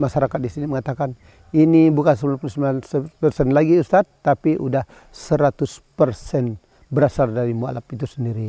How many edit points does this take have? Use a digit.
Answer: 0